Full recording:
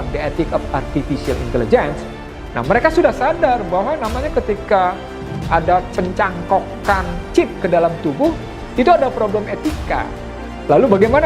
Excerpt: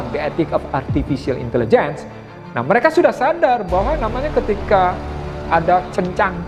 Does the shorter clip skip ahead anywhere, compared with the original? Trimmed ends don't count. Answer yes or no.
no